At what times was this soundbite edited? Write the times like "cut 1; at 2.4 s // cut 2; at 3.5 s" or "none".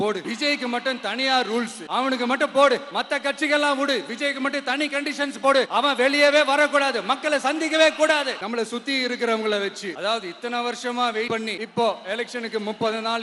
cut 1; at 1.8 s // cut 2; at 8.4 s